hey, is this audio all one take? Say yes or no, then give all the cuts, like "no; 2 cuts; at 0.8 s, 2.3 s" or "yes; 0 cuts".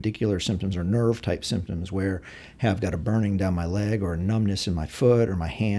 yes; 0 cuts